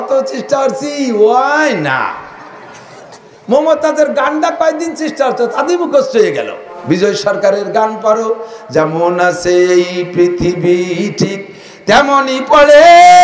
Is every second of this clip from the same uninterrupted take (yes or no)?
no